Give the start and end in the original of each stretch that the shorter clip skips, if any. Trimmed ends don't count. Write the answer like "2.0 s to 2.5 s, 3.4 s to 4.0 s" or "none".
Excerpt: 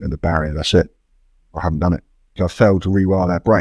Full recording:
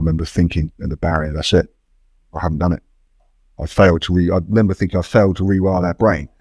3.1 s to 4.9 s